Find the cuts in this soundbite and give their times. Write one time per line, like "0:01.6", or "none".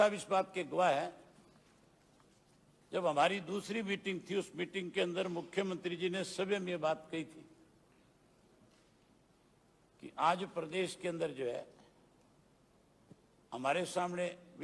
none